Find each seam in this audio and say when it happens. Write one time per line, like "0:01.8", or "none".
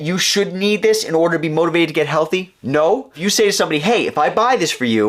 0:03.2